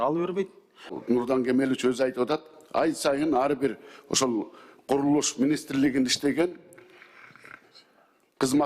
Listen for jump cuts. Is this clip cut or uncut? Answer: cut